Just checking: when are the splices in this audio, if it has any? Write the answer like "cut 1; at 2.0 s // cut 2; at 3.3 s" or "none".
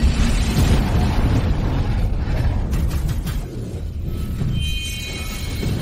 none